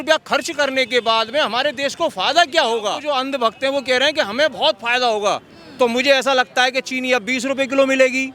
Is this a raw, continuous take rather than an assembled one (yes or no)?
no